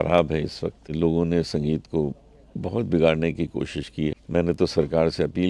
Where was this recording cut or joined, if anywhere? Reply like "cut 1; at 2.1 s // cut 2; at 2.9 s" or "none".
cut 1; at 0.9 s // cut 2; at 4.2 s